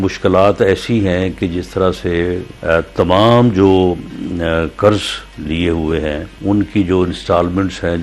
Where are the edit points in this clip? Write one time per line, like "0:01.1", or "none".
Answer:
0:02.5
0:06.3

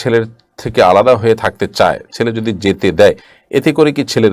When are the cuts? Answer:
none

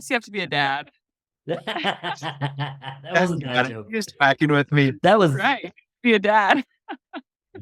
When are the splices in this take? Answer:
none

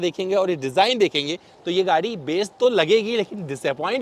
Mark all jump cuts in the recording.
none

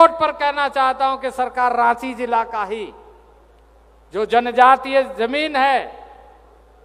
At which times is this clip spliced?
none

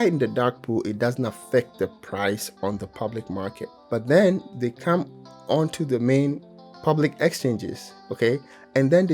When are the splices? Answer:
0:03.7
0:04.5
0:06.4

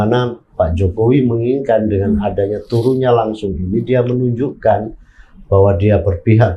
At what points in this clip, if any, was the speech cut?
none

